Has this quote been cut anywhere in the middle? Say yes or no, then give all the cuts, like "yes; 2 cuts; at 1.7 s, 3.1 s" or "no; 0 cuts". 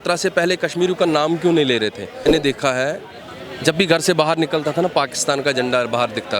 yes; 1 cut; at 2.3 s